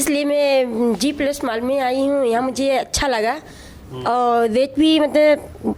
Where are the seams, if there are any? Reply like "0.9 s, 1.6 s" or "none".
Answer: none